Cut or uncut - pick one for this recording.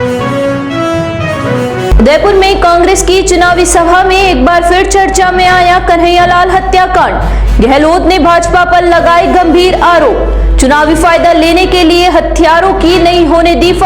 uncut